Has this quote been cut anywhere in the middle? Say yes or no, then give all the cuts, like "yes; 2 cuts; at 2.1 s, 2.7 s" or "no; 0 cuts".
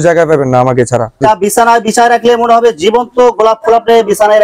yes; 1 cut; at 1.2 s